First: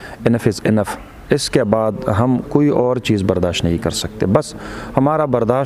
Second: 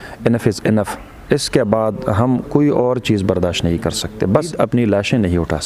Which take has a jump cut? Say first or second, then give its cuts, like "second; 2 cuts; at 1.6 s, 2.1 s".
second; 1 cut; at 4.5 s